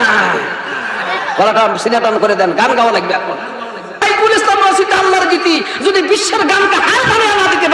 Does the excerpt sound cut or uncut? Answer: cut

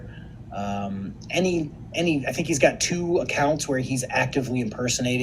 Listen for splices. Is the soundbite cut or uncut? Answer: cut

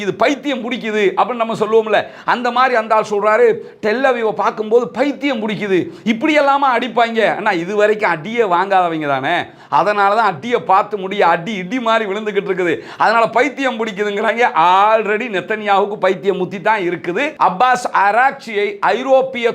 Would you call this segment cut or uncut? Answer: cut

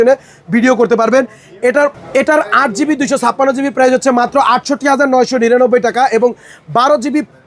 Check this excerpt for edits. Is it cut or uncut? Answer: uncut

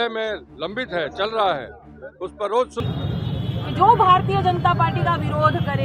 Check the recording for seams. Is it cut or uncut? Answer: cut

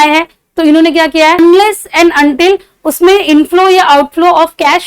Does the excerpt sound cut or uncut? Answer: cut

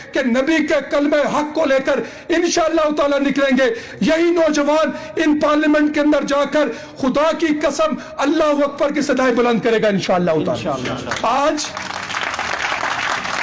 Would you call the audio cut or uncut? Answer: uncut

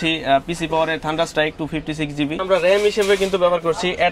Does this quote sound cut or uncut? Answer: cut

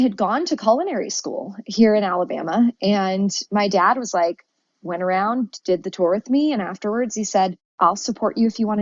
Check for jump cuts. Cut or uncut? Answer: cut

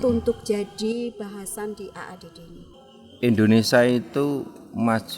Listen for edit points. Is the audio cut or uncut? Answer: cut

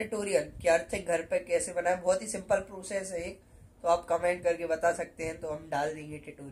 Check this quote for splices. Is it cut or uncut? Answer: uncut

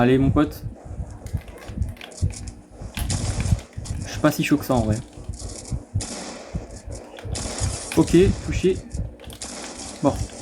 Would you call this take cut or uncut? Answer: cut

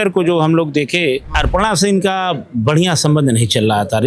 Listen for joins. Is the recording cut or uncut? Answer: cut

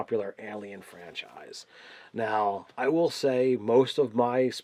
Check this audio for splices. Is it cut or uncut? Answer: uncut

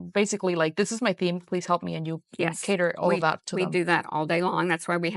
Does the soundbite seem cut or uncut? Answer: uncut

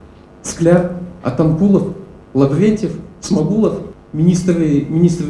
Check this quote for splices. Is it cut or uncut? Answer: cut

